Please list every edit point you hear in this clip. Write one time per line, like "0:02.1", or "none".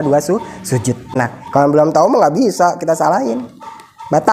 0:01.2